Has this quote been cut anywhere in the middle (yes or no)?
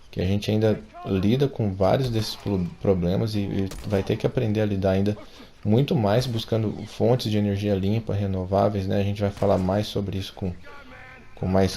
no